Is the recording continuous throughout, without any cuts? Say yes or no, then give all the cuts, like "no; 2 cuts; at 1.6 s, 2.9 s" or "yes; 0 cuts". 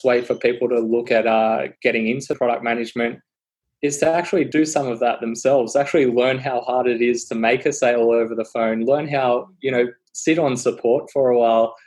no; 3 cuts; at 1.1 s, 2.3 s, 4.5 s